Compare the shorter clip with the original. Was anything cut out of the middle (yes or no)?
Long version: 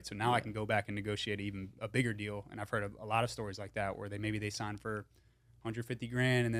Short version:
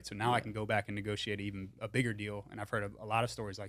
no